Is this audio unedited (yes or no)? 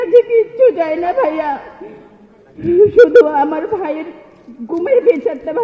yes